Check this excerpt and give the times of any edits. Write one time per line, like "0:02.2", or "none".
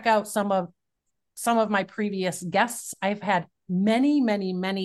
none